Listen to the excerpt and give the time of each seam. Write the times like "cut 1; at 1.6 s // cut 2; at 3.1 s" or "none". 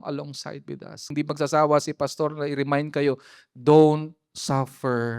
cut 1; at 1.1 s